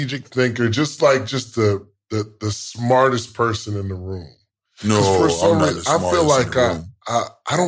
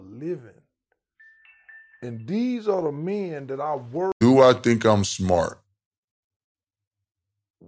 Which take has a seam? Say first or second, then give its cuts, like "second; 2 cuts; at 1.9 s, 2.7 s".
second; 1 cut; at 4.1 s